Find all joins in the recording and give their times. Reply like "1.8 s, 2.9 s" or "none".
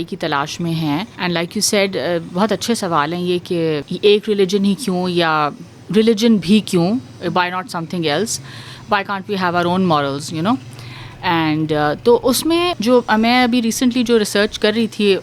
1.1 s, 3.9 s, 12.8 s